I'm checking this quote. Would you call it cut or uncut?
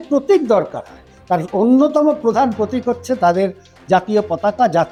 uncut